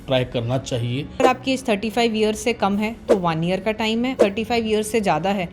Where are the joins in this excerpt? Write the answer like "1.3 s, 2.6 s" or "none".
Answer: 1.2 s, 4.1 s